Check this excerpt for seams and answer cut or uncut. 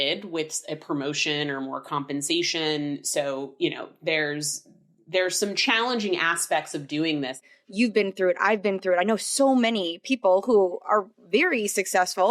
cut